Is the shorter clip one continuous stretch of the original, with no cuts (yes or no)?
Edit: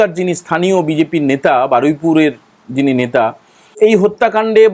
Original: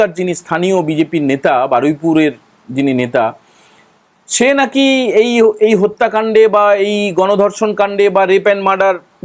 no